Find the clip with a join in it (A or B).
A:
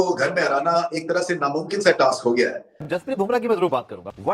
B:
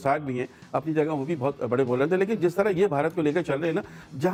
A